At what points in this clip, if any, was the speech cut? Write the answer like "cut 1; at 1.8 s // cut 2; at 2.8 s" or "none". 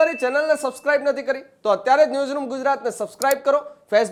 none